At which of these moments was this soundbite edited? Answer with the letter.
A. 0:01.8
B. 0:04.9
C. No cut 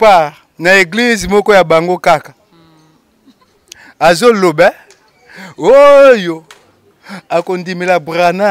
C